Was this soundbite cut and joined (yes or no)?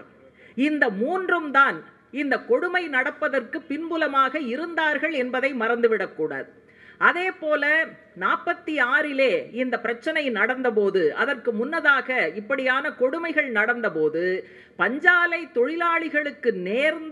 no